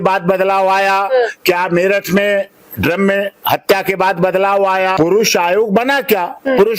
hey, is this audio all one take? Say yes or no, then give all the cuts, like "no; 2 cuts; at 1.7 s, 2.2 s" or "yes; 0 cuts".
no; 1 cut; at 4.9 s